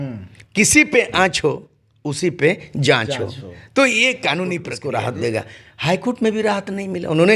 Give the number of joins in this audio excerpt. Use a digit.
1